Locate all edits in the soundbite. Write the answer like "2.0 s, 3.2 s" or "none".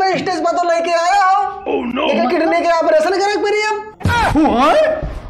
3.9 s

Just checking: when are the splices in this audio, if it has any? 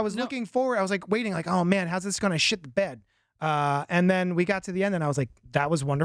none

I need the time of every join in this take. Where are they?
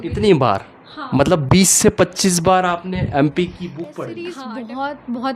4.1 s

